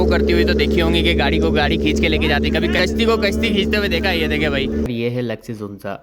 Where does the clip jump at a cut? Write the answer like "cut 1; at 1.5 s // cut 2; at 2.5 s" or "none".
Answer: cut 1; at 2.8 s // cut 2; at 4.9 s